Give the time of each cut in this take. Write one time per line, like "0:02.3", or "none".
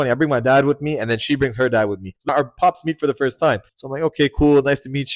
0:02.2